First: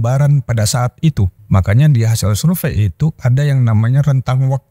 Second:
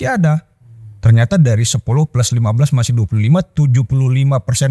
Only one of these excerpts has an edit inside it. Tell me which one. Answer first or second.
first